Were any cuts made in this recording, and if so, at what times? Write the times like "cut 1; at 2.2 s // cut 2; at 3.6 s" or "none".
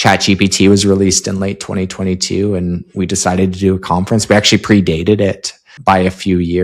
cut 1; at 5.6 s